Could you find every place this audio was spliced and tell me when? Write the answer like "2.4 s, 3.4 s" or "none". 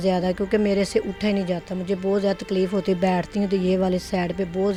none